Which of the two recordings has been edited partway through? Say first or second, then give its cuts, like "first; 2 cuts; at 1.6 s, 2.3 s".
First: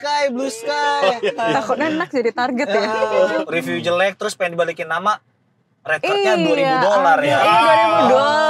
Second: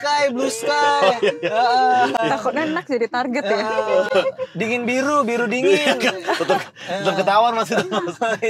first; 2 cuts; at 1.4 s, 3.3 s